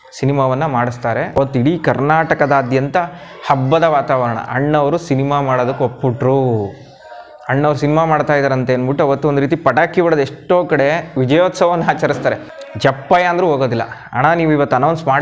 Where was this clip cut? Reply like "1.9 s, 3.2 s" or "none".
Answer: 1.3 s, 12.5 s